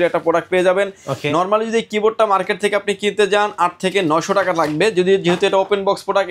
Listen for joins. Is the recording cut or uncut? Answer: uncut